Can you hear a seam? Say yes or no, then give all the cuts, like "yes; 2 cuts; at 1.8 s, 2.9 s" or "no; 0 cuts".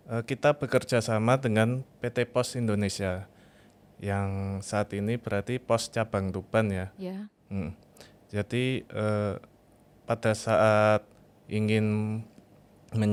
no; 0 cuts